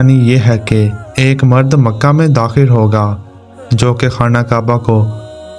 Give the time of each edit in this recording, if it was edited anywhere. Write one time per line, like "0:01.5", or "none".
none